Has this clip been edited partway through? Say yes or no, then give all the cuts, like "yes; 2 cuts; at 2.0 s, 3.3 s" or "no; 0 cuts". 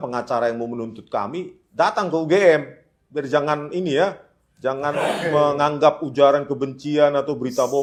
no; 0 cuts